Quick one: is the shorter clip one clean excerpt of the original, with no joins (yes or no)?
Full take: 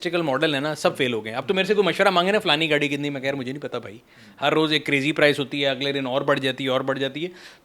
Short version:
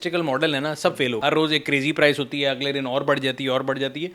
no